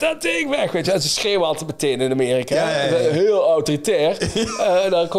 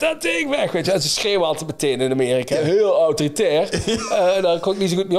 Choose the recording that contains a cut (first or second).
second